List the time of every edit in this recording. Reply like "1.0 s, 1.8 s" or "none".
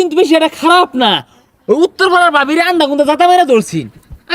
none